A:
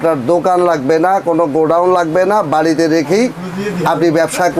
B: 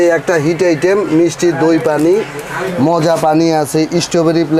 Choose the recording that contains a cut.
B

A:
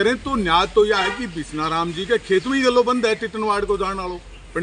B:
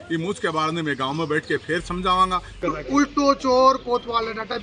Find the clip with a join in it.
B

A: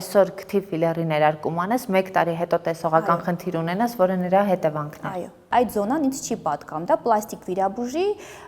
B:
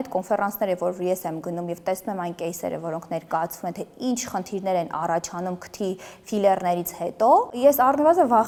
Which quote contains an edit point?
A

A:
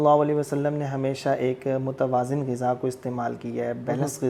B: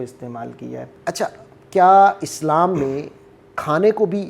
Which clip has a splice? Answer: B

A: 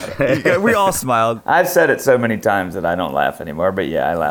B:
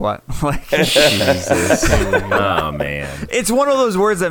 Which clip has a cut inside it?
A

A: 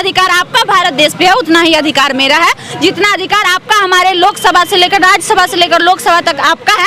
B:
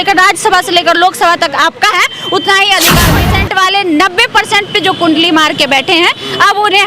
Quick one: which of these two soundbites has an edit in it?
B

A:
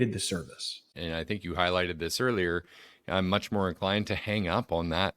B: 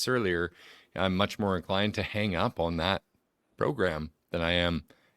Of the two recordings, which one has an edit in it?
A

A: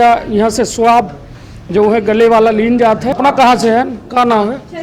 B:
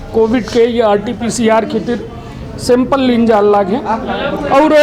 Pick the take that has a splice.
A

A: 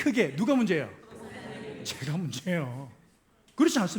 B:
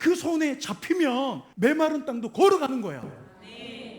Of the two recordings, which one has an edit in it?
B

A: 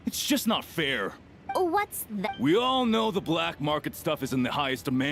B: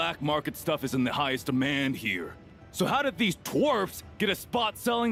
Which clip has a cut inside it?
A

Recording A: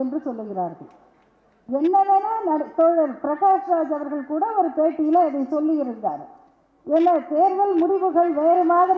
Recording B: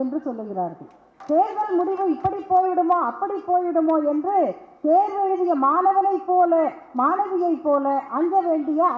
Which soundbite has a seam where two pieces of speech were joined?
B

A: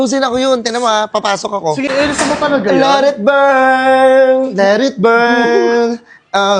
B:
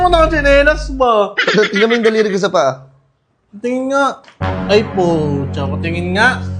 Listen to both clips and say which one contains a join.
A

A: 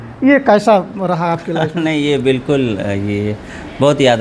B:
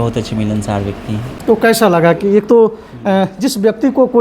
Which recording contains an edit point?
B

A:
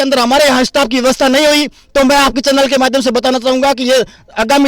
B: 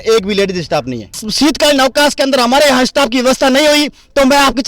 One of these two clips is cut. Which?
B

